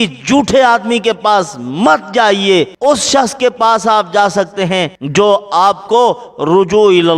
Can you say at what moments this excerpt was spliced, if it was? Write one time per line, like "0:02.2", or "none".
0:02.7
0:05.0